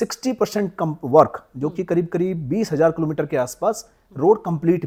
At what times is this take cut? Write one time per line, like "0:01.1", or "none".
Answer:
none